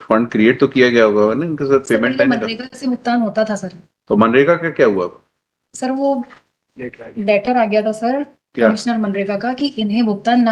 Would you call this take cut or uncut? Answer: uncut